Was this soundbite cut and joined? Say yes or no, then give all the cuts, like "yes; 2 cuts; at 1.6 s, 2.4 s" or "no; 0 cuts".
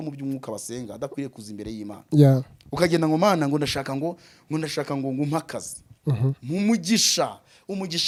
no; 0 cuts